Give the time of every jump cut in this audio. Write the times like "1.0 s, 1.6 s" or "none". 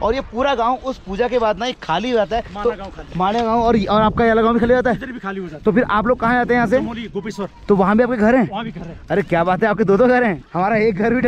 none